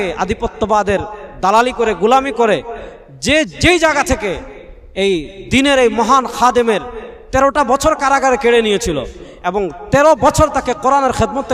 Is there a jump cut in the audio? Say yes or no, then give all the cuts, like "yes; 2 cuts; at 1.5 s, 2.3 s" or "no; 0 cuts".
no; 0 cuts